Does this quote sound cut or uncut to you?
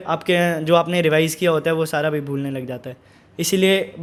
uncut